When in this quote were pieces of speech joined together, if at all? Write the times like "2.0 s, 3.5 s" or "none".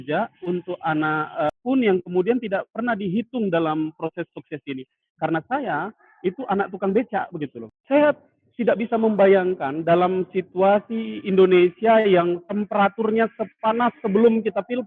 7.7 s